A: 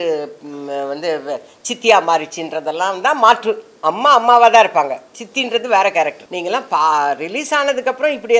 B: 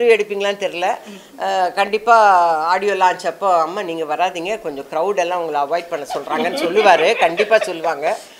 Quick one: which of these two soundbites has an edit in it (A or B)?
A